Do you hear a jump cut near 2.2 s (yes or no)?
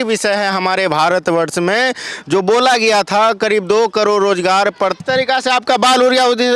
no